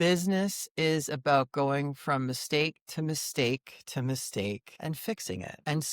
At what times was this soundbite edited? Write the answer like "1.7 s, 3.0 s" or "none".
4.9 s